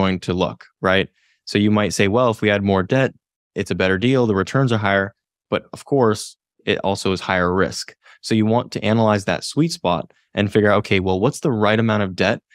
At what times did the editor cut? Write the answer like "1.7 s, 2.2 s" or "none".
none